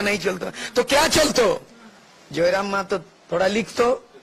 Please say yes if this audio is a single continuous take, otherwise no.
yes